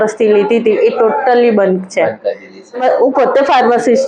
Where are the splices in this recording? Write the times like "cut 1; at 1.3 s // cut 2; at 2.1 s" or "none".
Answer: cut 1; at 2.8 s

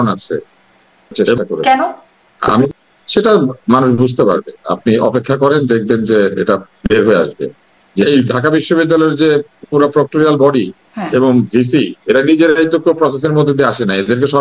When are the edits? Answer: cut 1; at 1.4 s // cut 2; at 2.8 s // cut 3; at 8.0 s

